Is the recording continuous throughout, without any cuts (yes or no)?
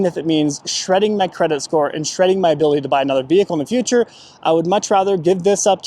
yes